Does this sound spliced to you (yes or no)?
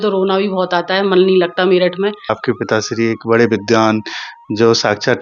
yes